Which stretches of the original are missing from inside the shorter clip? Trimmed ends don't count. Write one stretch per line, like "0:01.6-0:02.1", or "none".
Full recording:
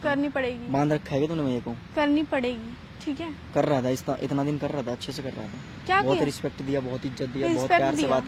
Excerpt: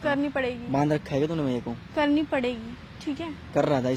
none